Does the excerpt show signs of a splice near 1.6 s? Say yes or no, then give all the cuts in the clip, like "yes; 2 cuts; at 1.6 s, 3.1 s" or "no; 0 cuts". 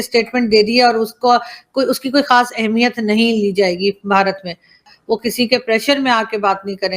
no; 1 cut; at 4.8 s